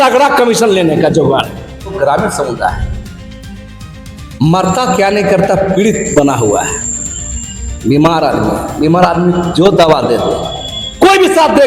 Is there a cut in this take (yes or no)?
yes